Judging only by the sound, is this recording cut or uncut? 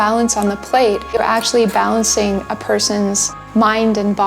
cut